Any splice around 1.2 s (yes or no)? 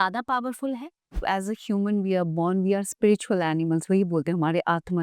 yes